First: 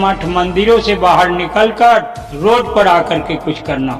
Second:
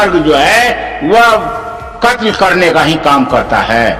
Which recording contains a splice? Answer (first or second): first